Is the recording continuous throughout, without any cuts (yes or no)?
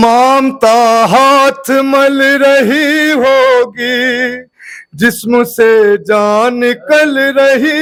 yes